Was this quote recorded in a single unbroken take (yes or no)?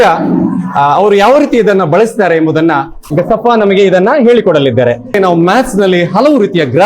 no